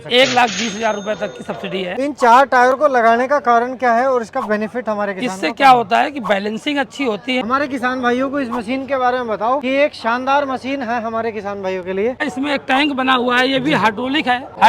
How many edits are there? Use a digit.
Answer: 3